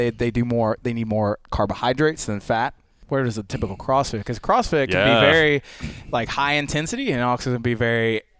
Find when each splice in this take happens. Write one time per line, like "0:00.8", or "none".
0:02.9